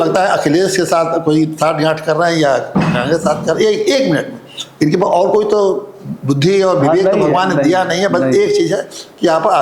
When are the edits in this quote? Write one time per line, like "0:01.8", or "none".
none